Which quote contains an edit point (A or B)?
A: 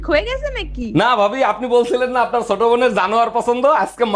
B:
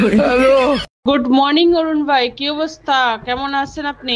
B